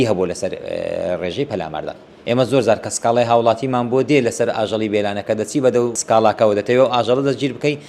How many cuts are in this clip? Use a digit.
2